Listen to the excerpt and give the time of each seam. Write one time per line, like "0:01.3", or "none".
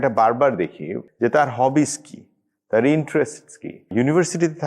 0:00.9
0:03.8